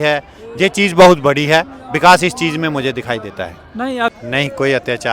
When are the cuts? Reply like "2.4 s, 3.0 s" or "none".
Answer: 4.1 s